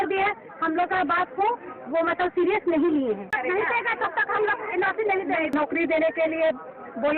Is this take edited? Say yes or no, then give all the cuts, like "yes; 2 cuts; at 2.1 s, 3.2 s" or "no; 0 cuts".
yes; 2 cuts; at 3.3 s, 5.5 s